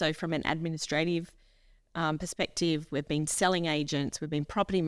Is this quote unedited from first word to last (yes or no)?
yes